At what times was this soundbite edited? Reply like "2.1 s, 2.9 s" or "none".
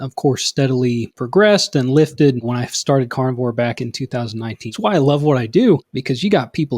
1.1 s, 2.4 s, 4.7 s, 5.9 s